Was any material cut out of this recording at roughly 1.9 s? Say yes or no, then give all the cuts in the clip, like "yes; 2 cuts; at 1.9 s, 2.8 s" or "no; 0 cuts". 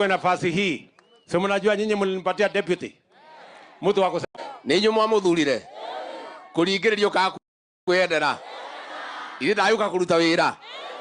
no; 1 cut; at 4.2 s